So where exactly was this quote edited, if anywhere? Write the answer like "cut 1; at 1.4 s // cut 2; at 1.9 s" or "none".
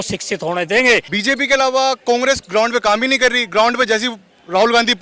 cut 1; at 1.1 s